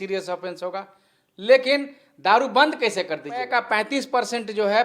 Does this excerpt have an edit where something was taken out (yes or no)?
yes